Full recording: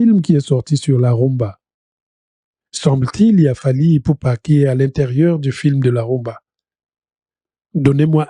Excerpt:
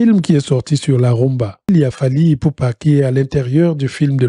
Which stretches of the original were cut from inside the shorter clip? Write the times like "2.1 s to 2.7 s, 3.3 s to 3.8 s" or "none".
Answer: 1.7 s to 3.3 s